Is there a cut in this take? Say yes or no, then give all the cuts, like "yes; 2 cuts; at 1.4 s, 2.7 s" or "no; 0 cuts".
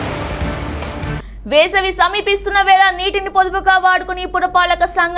yes; 1 cut; at 1.1 s